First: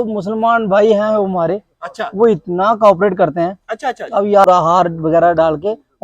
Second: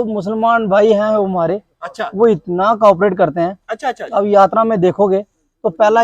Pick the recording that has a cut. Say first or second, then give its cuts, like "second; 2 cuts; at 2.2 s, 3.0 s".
first; 1 cut; at 4.5 s